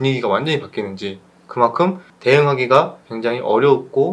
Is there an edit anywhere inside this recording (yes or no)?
no